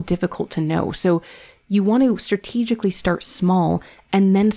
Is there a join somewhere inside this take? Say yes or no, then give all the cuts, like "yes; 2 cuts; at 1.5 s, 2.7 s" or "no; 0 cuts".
no; 0 cuts